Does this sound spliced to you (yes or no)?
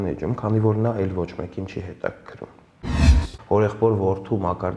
yes